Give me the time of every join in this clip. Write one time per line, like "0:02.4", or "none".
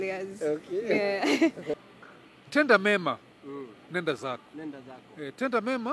0:01.8